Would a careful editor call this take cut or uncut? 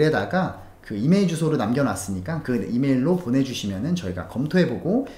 uncut